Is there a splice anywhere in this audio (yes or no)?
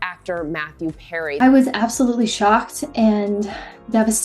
yes